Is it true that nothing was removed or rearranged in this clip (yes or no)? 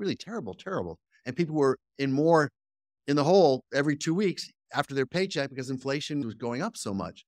no